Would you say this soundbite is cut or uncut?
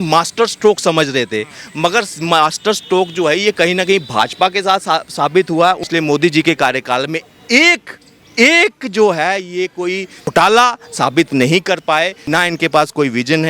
cut